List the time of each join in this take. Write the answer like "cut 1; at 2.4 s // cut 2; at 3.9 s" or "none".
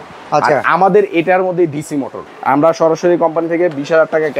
cut 1; at 2.2 s